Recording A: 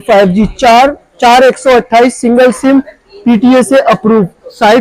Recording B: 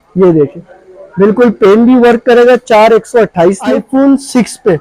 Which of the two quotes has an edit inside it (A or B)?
B